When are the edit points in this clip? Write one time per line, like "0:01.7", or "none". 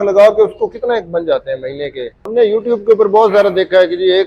0:02.3